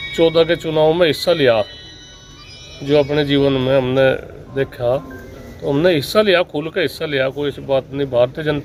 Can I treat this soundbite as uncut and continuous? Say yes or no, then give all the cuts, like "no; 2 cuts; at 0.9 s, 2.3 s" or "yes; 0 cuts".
yes; 0 cuts